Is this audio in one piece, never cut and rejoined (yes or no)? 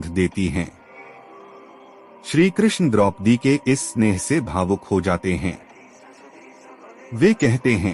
yes